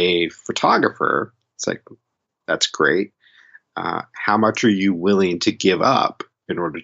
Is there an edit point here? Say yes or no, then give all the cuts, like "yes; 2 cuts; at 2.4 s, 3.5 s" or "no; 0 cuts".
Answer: no; 0 cuts